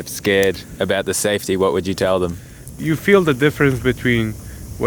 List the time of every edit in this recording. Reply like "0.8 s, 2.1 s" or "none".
2.7 s